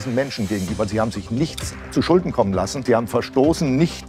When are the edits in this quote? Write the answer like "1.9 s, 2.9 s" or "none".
2.8 s